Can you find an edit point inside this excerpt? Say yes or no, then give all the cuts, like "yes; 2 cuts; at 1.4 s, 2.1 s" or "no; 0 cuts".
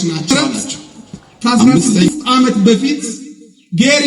yes; 1 cut; at 2.1 s